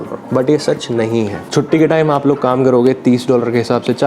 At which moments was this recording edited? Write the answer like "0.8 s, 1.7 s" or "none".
1.4 s